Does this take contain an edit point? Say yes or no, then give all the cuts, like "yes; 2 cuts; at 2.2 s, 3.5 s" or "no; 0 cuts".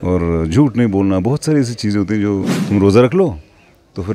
yes; 1 cut; at 2.5 s